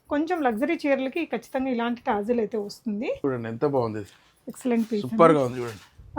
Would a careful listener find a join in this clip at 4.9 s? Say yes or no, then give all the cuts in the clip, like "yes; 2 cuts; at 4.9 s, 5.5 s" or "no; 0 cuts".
no; 1 cut; at 3.2 s